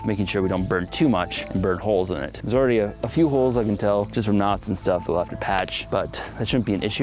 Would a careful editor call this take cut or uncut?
uncut